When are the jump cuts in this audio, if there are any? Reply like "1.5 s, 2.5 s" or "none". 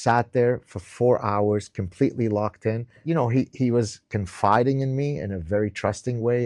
3.0 s